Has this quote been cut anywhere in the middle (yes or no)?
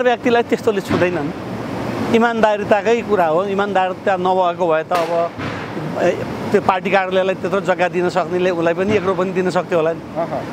no